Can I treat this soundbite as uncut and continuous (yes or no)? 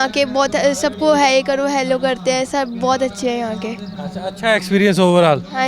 yes